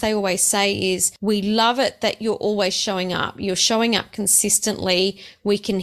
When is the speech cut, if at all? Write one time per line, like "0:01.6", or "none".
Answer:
0:01.1